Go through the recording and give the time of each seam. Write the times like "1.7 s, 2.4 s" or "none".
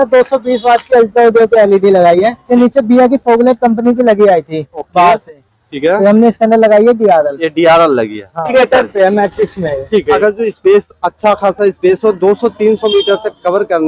2.4 s, 8.5 s, 10.2 s